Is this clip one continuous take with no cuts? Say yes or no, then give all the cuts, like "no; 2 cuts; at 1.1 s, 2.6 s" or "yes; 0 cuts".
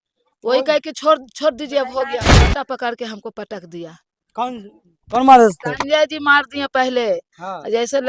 no; 1 cut; at 2.5 s